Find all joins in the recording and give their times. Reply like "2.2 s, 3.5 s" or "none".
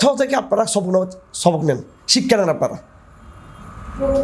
none